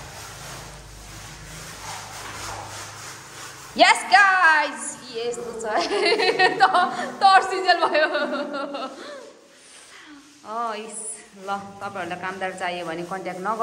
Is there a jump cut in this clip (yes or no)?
no